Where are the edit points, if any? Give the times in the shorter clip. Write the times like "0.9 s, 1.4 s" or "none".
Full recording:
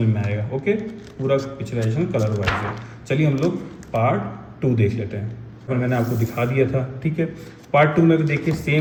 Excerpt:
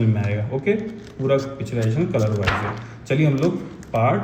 none